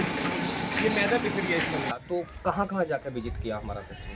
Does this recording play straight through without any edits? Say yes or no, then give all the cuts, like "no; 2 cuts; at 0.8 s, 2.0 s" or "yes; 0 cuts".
no; 1 cut; at 1.9 s